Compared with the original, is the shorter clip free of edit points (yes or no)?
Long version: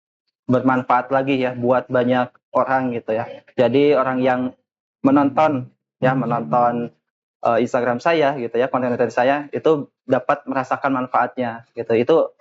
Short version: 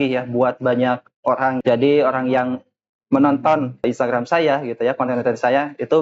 no